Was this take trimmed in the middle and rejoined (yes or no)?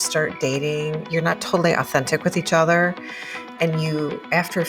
yes